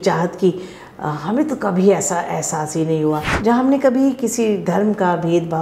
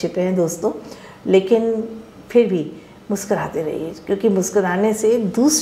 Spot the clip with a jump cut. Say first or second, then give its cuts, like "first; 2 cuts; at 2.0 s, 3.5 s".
first; 1 cut; at 3.3 s